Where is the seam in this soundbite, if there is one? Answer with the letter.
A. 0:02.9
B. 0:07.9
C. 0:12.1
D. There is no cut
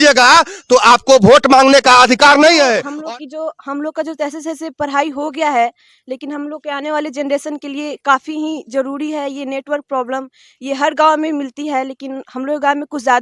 A